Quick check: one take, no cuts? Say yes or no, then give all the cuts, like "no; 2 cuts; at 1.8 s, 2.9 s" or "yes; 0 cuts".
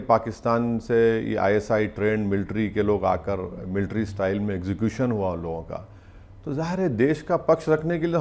yes; 0 cuts